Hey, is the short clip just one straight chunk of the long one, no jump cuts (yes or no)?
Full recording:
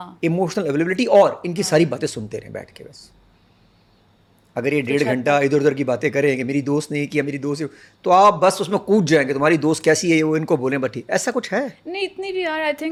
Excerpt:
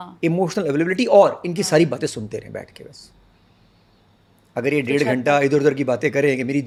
yes